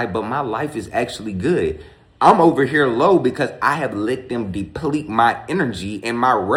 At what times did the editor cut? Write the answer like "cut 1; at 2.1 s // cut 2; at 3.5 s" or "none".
none